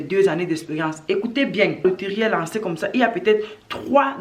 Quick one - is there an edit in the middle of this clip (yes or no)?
yes